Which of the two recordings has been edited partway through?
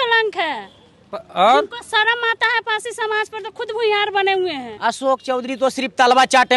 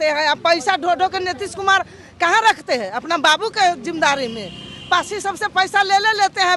first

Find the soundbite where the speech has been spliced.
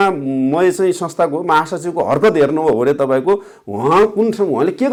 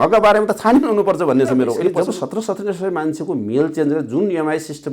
second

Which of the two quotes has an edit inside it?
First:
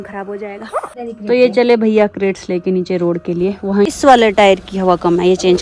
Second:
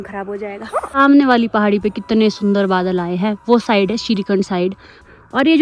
first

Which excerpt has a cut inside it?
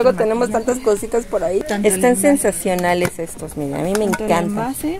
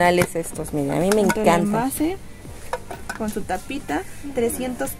first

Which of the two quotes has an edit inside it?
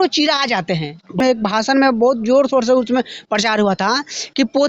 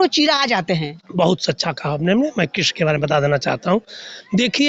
first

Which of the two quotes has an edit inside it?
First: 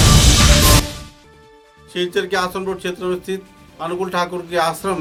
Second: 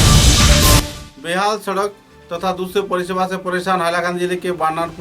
second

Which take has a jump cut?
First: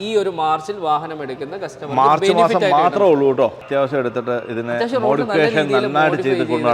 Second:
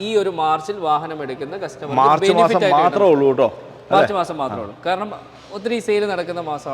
first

